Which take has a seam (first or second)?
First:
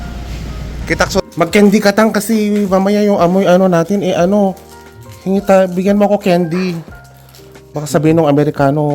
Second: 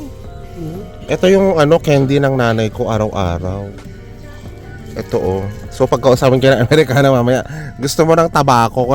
first